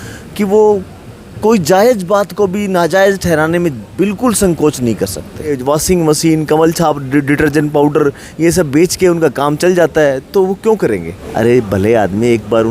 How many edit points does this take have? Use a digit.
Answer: 2